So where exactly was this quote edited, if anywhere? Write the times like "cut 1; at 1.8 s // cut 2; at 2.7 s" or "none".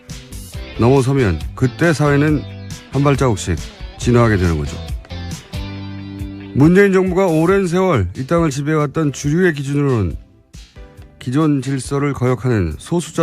cut 1; at 9.3 s